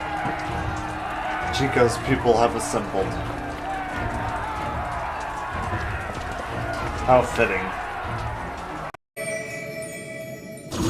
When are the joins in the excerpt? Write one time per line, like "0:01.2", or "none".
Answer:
0:09.0

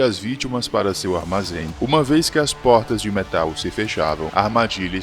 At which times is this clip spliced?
0:01.7

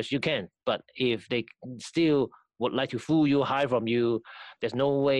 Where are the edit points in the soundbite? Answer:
none

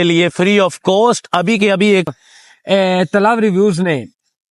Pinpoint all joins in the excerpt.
0:02.1

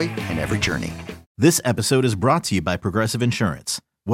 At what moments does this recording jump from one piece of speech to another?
0:01.3

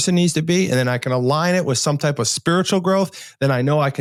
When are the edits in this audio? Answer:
none

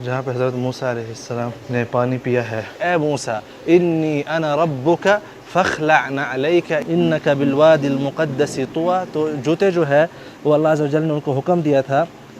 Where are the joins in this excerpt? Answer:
0:01.6
0:02.8
0:06.8

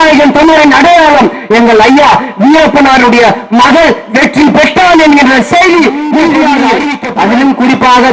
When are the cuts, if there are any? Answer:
0:07.0

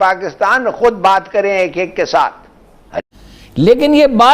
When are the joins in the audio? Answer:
0:02.9

